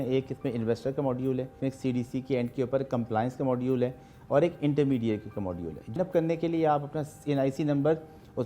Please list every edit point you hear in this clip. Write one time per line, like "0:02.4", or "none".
0:01.5
0:06.0